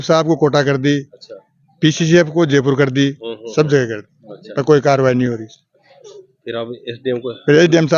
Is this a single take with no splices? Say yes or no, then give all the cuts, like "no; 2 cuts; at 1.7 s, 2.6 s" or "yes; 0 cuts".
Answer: yes; 0 cuts